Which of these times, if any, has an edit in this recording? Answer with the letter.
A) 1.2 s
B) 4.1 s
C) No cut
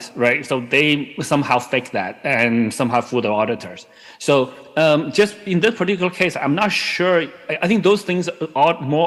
C